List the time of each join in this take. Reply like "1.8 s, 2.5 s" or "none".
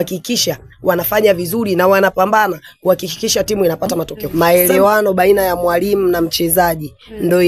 4.2 s